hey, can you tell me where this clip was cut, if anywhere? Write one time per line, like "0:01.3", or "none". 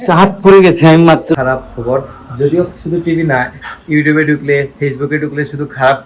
0:01.3